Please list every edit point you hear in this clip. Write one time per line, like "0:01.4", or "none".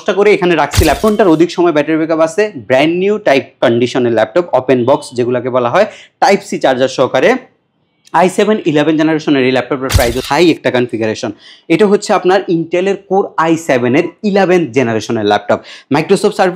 0:01.0
0:10.2